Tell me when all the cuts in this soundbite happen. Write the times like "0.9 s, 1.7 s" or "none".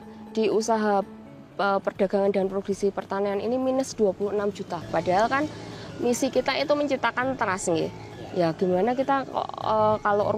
4.9 s